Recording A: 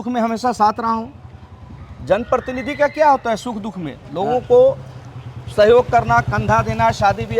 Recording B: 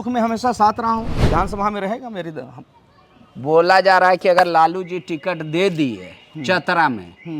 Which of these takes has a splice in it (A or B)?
B